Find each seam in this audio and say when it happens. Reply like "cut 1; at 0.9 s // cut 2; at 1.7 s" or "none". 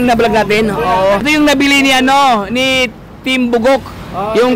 cut 1; at 1.2 s